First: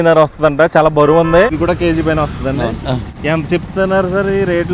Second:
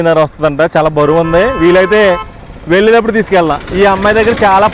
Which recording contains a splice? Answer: first; 2 cuts; at 1.5 s, 3.1 s

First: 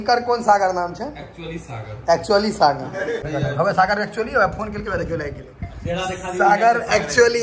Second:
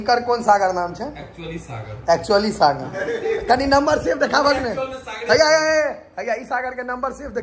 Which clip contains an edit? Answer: first; 1 cut; at 3.2 s

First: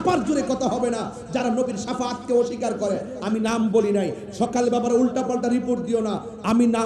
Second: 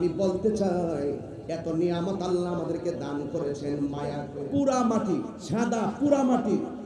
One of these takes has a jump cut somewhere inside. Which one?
second; 1 cut; at 4.3 s

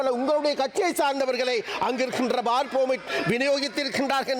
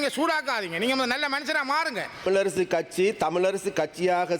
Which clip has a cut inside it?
second; 1 cut; at 2.2 s

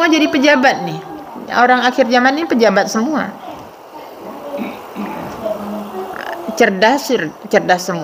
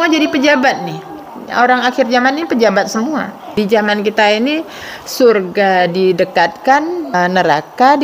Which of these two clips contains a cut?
second; 2 cuts; at 3.5 s, 7.1 s

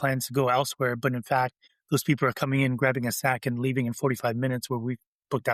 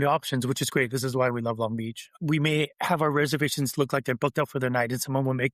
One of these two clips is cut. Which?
second; 1 cut; at 2.0 s

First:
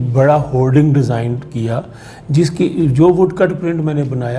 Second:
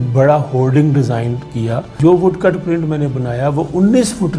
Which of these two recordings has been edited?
second; 1 cut; at 2.0 s

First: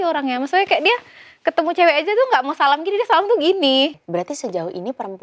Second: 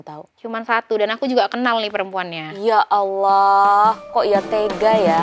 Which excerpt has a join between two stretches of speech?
first; 1 cut; at 4.0 s

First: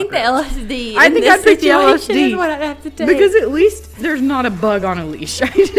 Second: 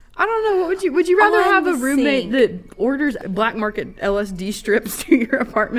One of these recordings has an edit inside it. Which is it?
second; 1 cut; at 3.2 s

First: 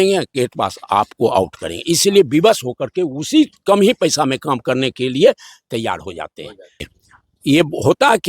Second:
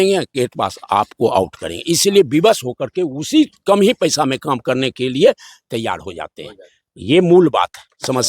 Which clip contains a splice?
first; 1 cut; at 6.9 s

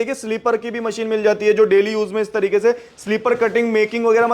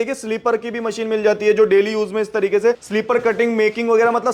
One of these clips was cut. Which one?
second; 1 cut; at 2.8 s

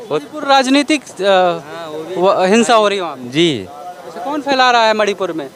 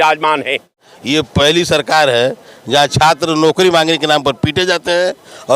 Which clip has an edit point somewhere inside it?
second; 1 cut; at 1.0 s

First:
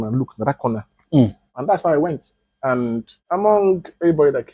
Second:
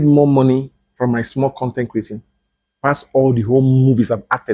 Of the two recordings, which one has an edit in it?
first; 2 cuts; at 1.5 s, 3.1 s

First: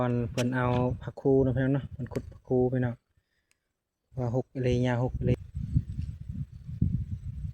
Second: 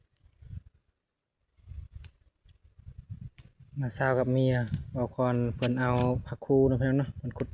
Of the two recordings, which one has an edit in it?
first; 1 cut; at 5.3 s

